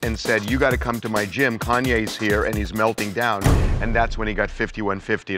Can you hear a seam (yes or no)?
no